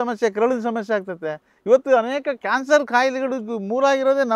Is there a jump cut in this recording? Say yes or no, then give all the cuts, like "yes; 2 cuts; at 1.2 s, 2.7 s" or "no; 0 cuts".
no; 0 cuts